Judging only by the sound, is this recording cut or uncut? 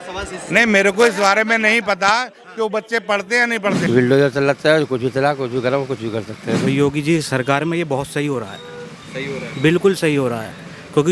cut